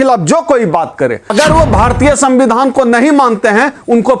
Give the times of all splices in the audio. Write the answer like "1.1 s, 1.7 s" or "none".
1.3 s